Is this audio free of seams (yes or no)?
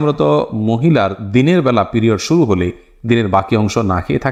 yes